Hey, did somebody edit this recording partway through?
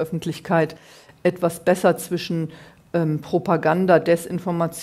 no; 0 cuts

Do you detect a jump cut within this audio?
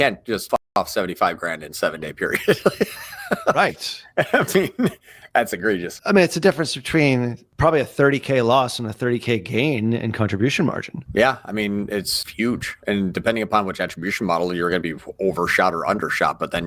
yes; 5 cuts; at 0.8 s, 5.9 s, 7.4 s, 11.0 s, 12.2 s

